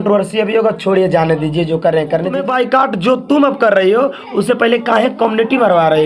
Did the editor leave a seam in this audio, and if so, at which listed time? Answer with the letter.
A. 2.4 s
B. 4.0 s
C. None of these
A